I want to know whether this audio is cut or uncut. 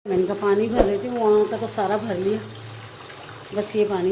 uncut